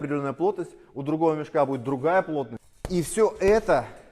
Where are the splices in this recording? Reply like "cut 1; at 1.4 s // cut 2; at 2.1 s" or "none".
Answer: cut 1; at 2.6 s